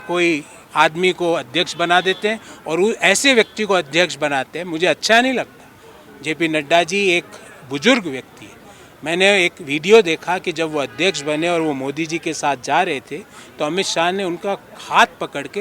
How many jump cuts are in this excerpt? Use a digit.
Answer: 0